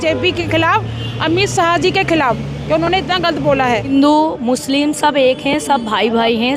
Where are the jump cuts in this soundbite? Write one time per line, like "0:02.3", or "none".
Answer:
0:03.9